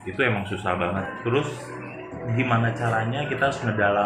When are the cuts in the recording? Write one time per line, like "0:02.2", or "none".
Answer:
0:01.1